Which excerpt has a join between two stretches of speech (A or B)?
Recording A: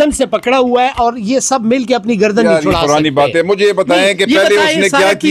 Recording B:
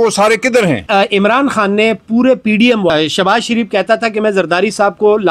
B